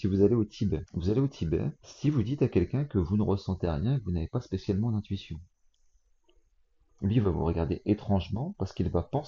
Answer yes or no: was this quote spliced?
yes